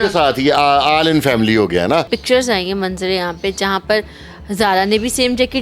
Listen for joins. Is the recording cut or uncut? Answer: cut